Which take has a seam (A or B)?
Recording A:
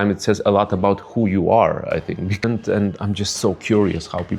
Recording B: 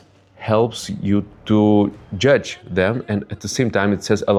A